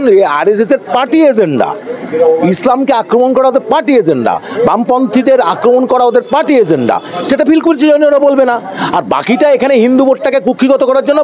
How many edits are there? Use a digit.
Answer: 0